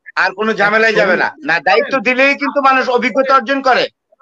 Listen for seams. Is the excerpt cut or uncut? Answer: cut